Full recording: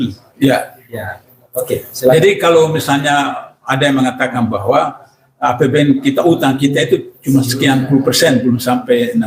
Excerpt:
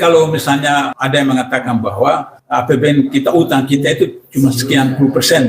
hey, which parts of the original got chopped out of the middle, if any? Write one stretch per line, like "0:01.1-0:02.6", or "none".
0:03.4-0:03.6
0:05.0-0:05.3